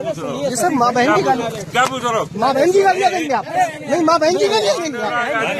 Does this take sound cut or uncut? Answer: uncut